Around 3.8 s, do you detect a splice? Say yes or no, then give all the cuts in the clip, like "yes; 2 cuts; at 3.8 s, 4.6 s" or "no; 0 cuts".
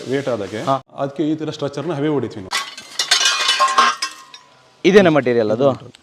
no; 2 cuts; at 0.8 s, 2.4 s